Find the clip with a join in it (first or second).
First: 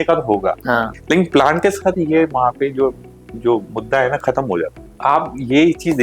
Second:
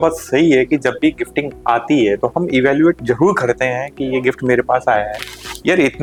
first